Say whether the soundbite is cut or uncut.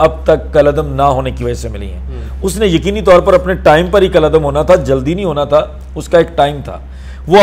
uncut